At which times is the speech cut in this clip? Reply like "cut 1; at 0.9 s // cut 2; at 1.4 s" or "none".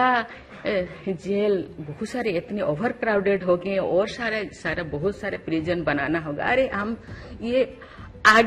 none